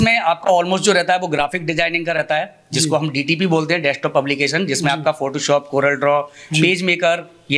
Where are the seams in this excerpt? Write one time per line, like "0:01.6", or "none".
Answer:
none